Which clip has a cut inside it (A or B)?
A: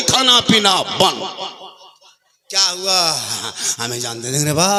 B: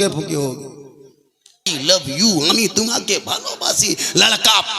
B